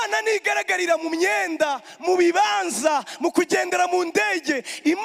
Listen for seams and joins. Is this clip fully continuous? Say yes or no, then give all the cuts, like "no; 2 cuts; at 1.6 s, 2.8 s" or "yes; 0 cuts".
yes; 0 cuts